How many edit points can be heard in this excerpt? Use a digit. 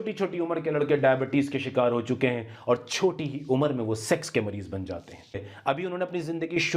1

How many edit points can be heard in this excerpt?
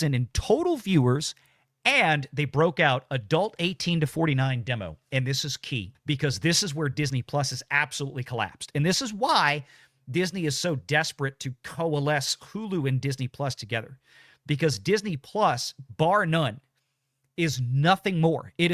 1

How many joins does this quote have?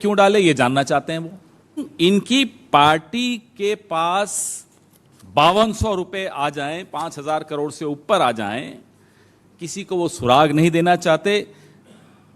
1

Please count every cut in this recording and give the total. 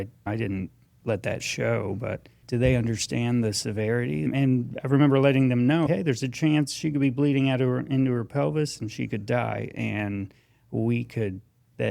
3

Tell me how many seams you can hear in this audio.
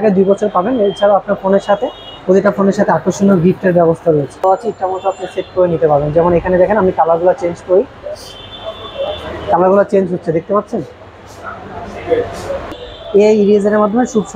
2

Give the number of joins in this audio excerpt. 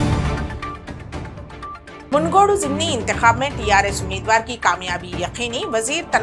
1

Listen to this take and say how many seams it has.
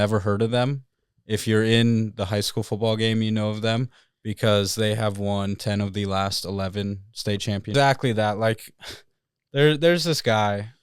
1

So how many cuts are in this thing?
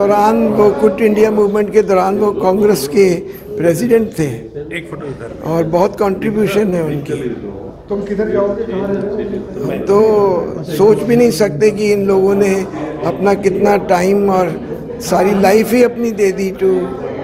0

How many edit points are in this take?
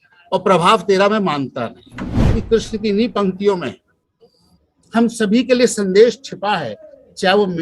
1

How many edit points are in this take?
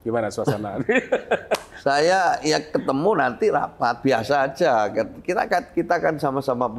0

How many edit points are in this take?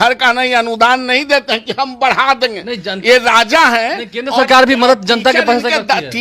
0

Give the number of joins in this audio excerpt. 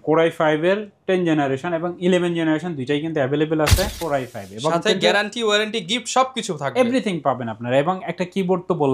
1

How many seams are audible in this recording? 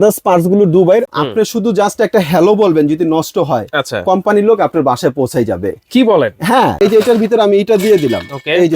2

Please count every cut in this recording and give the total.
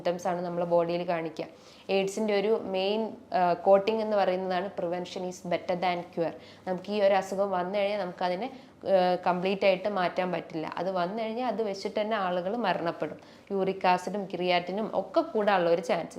1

